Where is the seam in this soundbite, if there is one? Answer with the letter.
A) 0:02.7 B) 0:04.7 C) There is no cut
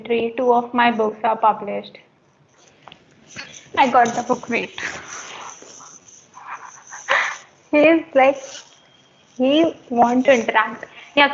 A